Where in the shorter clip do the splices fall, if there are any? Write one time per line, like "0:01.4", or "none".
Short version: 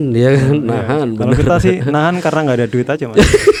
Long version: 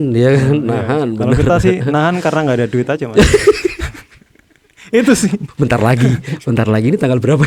none